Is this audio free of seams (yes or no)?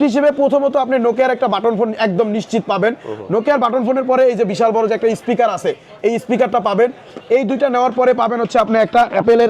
yes